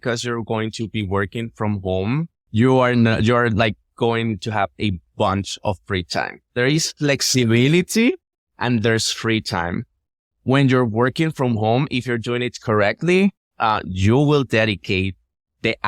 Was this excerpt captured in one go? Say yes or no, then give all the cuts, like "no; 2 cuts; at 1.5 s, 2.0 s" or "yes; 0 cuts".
yes; 0 cuts